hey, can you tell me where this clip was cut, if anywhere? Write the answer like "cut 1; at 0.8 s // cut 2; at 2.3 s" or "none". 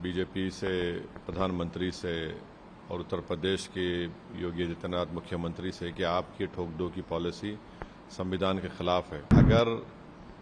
cut 1; at 9.3 s